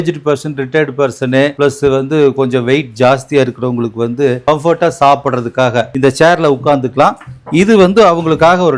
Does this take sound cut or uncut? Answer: uncut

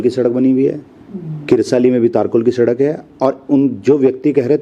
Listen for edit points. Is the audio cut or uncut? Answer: uncut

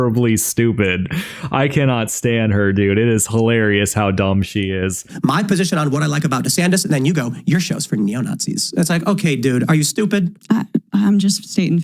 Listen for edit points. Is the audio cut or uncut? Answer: cut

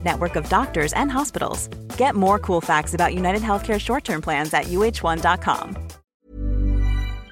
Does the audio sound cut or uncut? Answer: cut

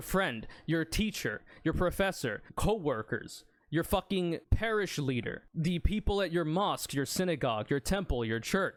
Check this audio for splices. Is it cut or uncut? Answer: uncut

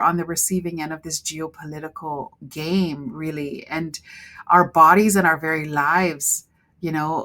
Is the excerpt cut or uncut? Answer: uncut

